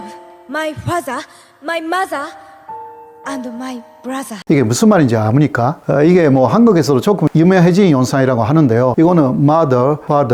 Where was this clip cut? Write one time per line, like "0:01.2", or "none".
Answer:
none